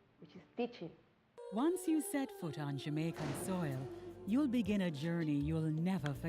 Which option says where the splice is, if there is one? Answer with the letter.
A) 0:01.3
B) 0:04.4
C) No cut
A